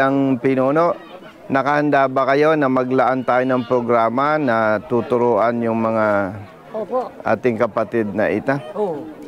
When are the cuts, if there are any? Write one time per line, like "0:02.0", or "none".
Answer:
none